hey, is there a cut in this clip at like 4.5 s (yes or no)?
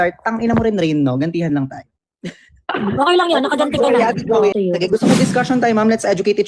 yes